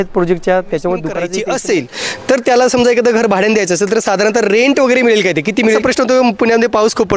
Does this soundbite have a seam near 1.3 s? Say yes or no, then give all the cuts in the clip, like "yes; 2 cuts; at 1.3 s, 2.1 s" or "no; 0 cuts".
yes; 2 cuts; at 1.3 s, 5.8 s